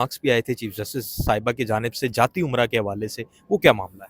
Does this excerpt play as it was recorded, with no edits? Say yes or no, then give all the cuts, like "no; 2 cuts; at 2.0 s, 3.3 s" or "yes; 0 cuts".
yes; 0 cuts